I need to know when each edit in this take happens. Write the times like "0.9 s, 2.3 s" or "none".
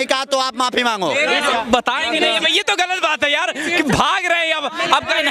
1.5 s